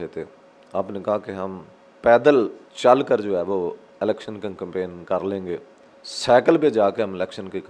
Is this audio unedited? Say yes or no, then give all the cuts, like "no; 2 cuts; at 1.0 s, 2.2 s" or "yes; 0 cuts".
no; 1 cut; at 2.6 s